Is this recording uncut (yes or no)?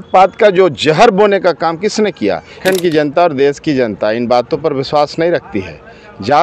no